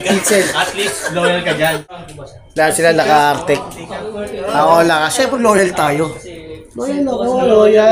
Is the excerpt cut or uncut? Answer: cut